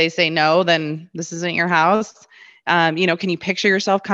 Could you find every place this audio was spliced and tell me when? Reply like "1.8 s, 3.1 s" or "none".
none